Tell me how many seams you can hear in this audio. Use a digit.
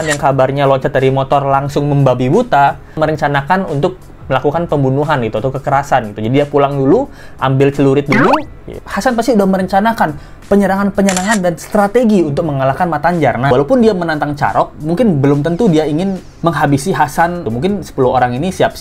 5